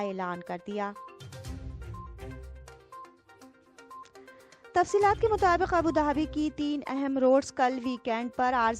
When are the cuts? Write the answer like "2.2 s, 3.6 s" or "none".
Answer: none